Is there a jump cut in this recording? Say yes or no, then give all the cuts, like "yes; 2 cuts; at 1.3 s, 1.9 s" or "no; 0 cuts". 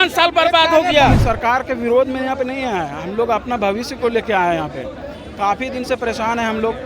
yes; 1 cut; at 1.2 s